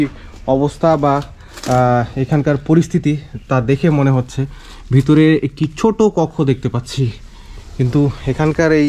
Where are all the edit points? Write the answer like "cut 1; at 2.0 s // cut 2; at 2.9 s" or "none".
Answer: none